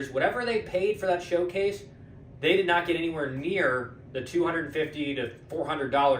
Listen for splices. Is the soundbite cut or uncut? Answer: uncut